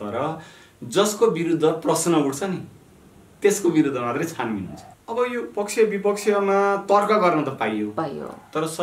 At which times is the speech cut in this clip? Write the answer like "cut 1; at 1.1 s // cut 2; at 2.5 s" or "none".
cut 1; at 4.8 s